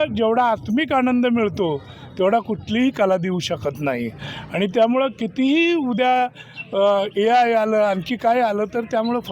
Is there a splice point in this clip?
no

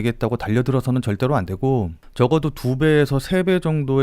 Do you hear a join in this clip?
yes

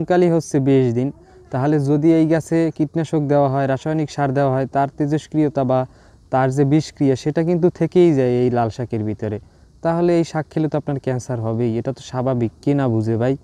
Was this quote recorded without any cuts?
yes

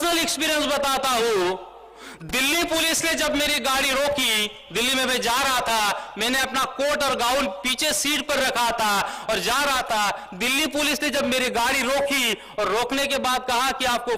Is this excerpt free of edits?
yes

